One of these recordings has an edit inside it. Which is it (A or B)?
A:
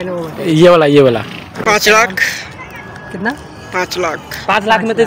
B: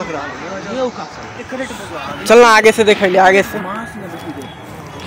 A